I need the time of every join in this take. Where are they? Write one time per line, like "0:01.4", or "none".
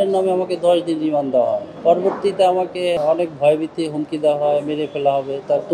0:01.7
0:03.0